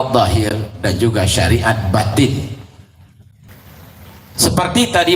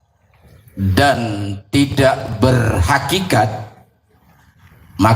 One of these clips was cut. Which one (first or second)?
first